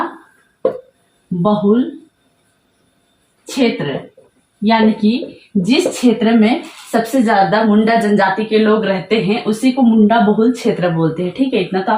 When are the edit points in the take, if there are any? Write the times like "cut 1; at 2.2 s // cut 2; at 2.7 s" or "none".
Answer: none